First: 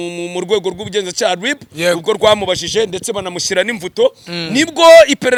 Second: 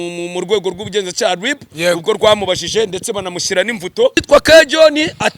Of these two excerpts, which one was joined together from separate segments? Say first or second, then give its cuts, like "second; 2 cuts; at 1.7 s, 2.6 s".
second; 1 cut; at 4.2 s